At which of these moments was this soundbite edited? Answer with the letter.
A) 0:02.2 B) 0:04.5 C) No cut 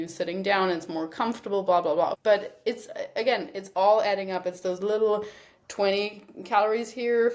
A